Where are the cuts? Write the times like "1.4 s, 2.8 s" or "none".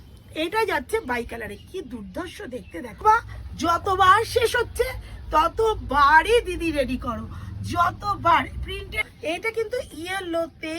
3.0 s, 9.0 s